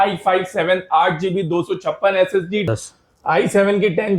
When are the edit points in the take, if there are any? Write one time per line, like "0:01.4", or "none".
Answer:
0:02.7